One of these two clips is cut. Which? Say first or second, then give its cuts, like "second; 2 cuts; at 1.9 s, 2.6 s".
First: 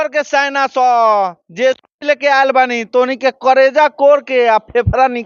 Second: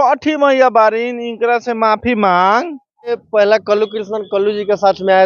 second; 1 cut; at 3.2 s